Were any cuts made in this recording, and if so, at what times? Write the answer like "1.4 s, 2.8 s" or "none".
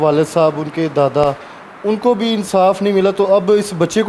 none